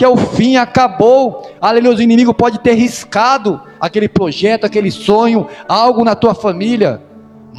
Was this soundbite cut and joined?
no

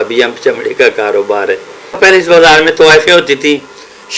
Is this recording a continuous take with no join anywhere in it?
no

